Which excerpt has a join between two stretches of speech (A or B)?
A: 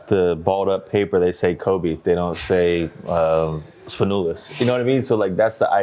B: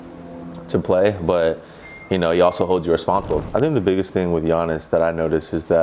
B